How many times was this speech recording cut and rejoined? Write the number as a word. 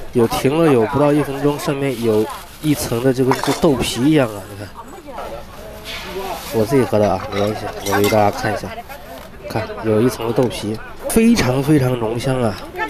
two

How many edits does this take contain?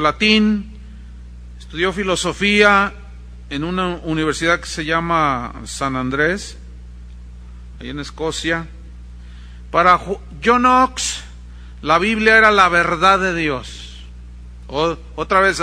one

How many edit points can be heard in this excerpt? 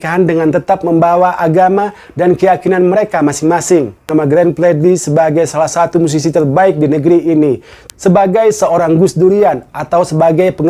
one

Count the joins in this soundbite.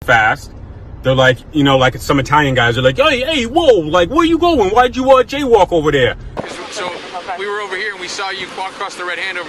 zero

